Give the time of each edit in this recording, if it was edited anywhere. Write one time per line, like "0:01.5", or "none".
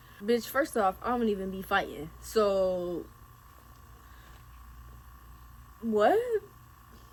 none

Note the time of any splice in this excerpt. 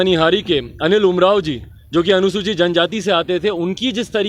none

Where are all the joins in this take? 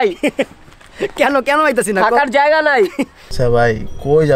0:03.2

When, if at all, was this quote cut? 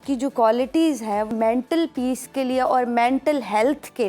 0:01.3

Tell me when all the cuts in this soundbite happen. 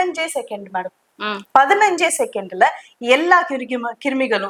none

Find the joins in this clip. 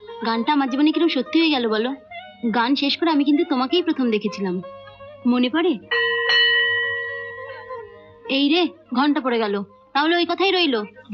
none

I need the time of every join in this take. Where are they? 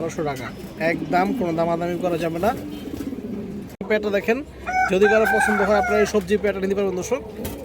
0:03.9

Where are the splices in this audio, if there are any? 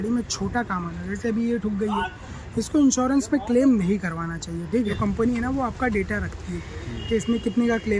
0:04.9

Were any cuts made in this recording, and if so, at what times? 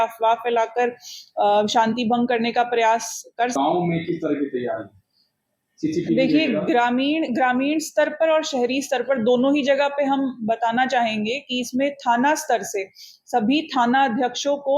0:03.5

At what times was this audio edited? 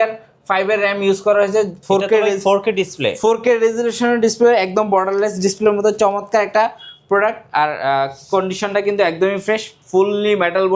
0:01.8

